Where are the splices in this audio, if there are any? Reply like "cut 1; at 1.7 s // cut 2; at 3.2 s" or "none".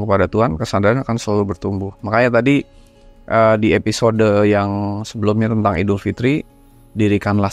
none